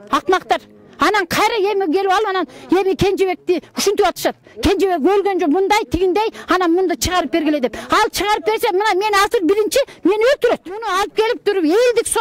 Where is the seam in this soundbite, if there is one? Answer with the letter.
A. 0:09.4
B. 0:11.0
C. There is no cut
B